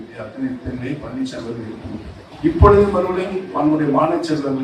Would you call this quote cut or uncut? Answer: cut